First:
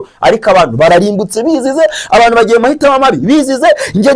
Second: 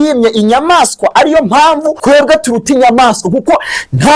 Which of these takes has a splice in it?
second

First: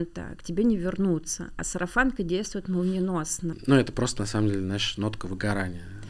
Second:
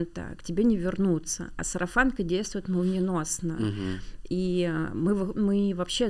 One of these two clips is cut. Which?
first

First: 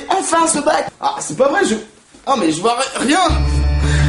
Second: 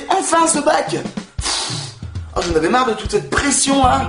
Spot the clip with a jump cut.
first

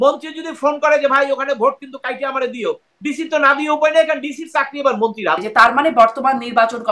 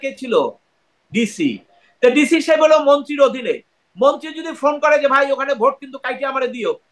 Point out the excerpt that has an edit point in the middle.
first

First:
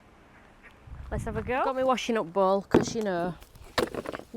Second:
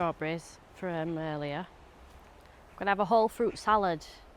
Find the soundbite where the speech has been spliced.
first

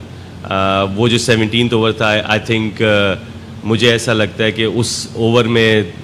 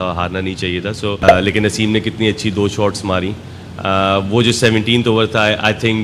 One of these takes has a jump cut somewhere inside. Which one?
second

